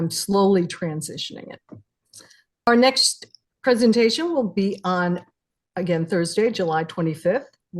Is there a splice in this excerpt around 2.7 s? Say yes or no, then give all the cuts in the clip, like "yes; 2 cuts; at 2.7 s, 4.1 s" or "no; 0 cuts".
yes; 1 cut; at 2.7 s